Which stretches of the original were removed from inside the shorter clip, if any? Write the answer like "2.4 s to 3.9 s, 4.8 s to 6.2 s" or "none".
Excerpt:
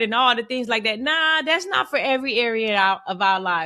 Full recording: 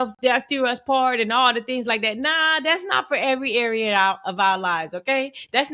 none